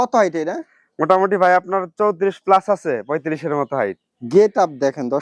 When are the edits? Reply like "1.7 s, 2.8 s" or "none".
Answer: none

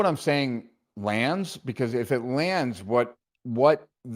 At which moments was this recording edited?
none

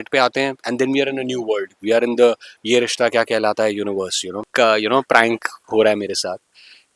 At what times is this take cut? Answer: 4.5 s

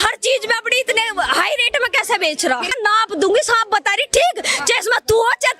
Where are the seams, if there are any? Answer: 2.7 s

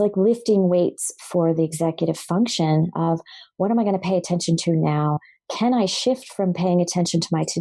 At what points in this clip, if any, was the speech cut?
none

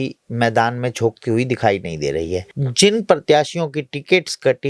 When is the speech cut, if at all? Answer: 2.6 s

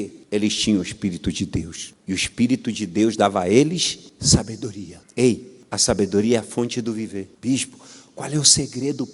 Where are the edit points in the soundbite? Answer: none

